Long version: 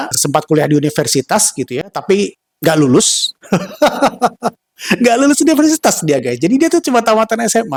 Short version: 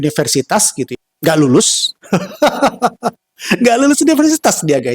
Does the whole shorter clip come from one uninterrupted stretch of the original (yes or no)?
no